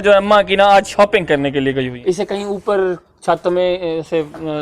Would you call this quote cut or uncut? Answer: cut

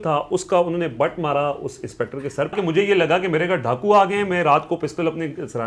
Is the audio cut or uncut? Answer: cut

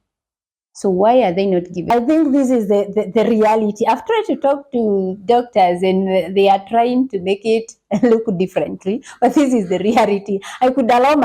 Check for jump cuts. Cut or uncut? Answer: cut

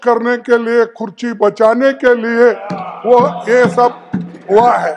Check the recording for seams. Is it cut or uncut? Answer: uncut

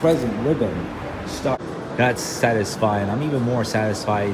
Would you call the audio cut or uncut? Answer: cut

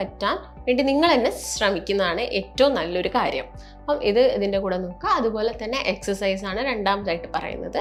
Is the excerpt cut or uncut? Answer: uncut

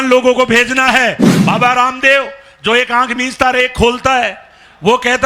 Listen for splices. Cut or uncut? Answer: cut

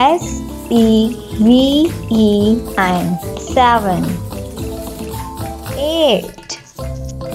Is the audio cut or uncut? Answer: cut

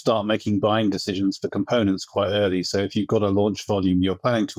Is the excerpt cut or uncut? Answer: uncut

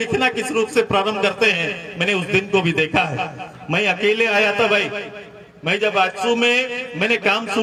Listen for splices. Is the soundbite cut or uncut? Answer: uncut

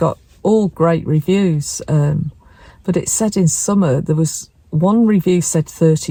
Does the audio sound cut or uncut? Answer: uncut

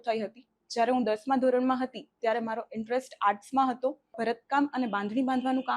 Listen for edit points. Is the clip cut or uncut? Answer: cut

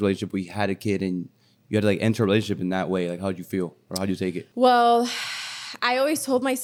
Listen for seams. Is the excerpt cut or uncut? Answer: uncut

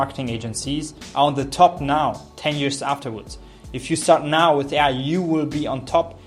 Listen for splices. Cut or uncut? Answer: uncut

